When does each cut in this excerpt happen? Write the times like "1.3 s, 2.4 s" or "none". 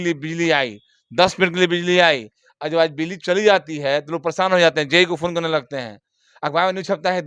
none